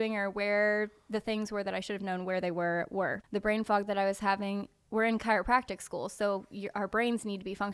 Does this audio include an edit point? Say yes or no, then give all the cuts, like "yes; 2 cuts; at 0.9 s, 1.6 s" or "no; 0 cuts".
yes; 1 cut; at 3.2 s